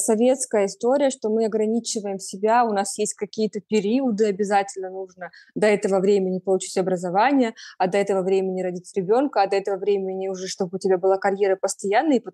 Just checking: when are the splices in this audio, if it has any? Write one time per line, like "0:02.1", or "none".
none

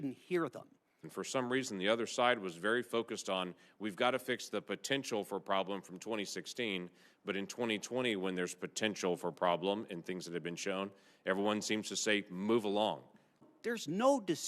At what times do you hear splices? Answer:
0:01.0
0:13.5

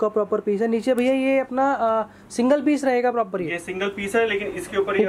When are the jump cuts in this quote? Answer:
none

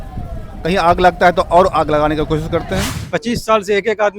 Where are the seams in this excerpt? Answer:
0:02.9

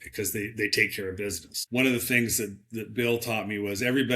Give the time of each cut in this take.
0:01.5

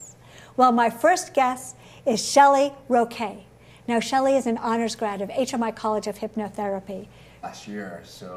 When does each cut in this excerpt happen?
none

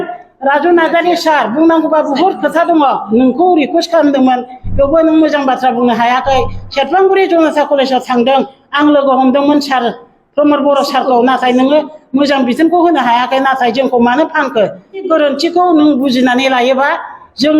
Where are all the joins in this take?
0:03.1
0:15.0

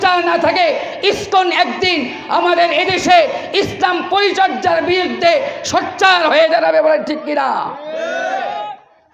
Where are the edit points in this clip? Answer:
none

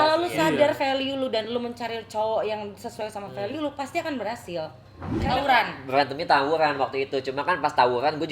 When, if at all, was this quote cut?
0:05.1

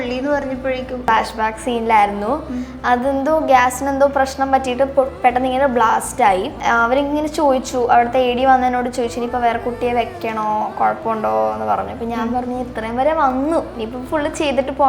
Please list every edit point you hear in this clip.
0:01.1
0:06.5

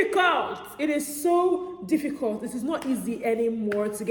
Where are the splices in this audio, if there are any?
none

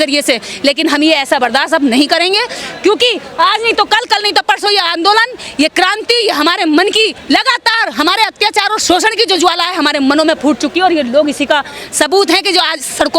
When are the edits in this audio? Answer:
none

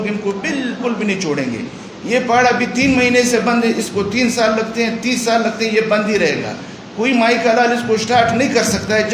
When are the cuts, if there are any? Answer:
none

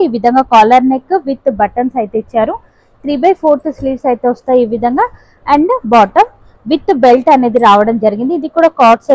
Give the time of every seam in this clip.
none

